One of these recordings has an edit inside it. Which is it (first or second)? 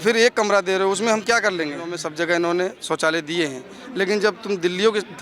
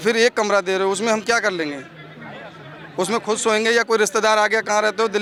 first